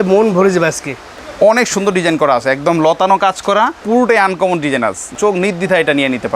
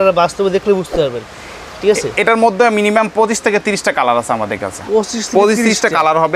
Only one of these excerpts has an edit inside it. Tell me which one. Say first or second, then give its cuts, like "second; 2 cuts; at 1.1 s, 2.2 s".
first; 2 cuts; at 3.8 s, 5.1 s